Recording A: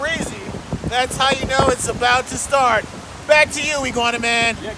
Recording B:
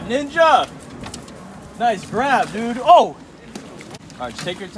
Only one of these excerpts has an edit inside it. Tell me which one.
B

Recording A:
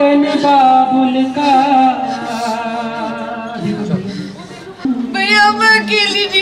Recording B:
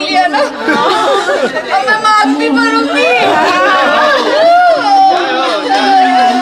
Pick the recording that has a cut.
A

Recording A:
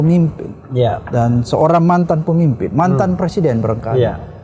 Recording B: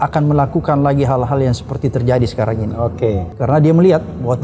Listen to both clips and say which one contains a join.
B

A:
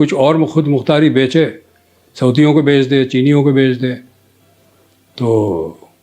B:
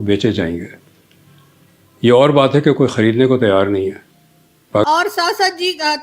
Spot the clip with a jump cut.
B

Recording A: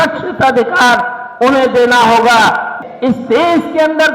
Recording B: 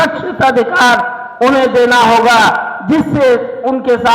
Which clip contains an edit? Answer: A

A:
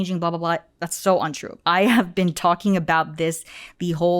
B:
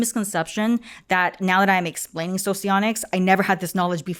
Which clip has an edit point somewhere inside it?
A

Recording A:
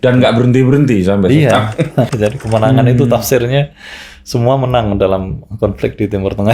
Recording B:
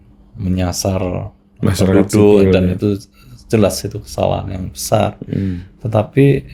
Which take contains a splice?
A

